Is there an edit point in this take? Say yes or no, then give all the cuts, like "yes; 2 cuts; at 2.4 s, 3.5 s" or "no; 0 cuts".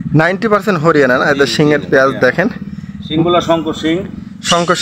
no; 0 cuts